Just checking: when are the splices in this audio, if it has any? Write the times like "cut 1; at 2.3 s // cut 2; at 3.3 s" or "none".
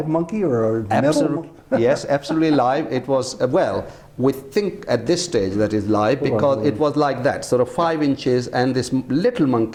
none